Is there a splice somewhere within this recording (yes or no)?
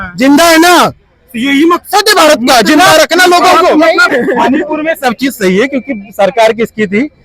yes